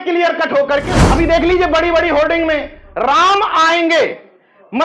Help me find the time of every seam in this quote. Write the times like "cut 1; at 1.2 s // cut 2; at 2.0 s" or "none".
cut 1; at 0.9 s